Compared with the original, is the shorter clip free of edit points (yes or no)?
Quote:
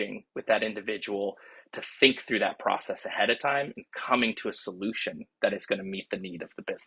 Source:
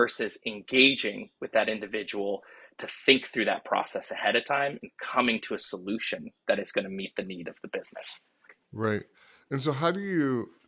yes